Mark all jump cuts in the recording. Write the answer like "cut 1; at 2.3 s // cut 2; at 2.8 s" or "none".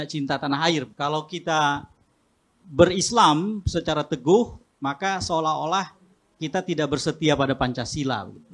cut 1; at 0.9 s